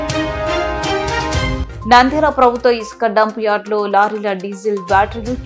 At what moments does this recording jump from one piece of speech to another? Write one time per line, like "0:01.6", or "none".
0:01.6